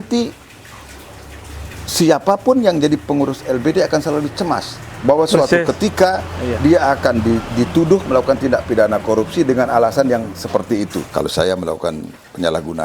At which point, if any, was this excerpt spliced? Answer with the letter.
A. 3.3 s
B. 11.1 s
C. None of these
B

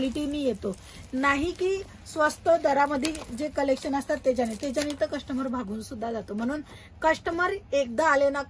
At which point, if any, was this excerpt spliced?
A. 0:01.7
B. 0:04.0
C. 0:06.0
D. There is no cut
D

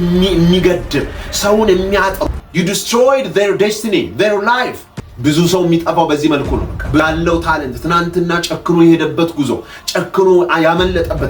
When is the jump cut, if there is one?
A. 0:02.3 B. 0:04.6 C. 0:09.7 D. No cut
A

